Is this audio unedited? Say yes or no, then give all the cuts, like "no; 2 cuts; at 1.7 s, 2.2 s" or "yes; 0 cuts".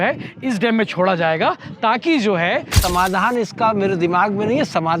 no; 1 cut; at 2.8 s